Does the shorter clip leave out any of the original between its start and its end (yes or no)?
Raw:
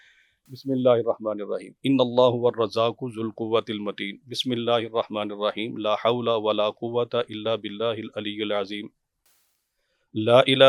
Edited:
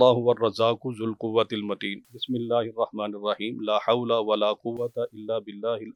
no